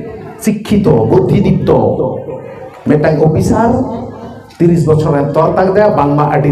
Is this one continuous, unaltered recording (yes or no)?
yes